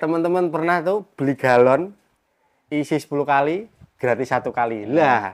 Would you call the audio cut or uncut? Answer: uncut